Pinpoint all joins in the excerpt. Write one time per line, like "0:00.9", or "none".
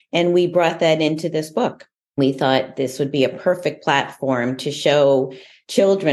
0:02.2